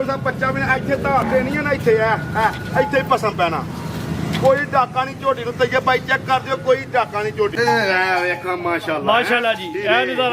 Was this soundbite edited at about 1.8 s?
no; 1 cut; at 7.5 s

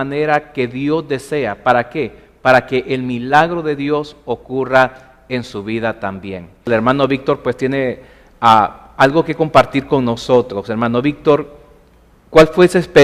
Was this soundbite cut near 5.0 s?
no; 1 cut; at 2.1 s

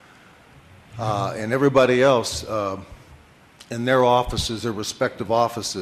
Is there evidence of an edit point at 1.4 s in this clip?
yes; 1 cut; at 1.4 s

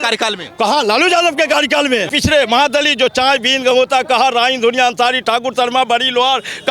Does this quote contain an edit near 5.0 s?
no; 1 cut; at 2.1 s

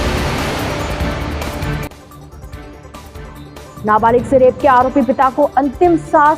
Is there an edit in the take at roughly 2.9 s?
yes; 2 cuts; at 2.9 s, 3.8 s

